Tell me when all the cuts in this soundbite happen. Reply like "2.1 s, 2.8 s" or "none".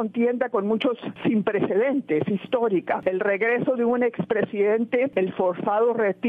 1.1 s, 3.0 s, 5.1 s